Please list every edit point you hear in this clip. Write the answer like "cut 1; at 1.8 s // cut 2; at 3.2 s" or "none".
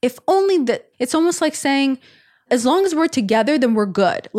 cut 1; at 0.9 s